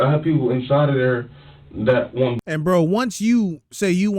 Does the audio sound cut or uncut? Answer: uncut